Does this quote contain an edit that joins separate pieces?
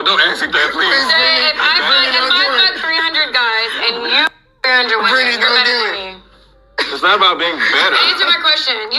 no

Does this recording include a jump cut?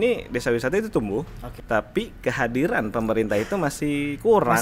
yes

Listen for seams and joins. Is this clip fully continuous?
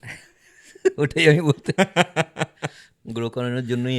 yes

